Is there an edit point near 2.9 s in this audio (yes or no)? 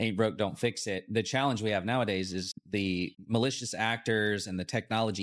yes